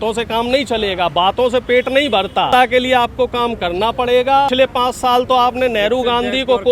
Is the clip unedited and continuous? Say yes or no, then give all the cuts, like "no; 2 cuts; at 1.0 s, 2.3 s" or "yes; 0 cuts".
no; 2 cuts; at 2.5 s, 4.5 s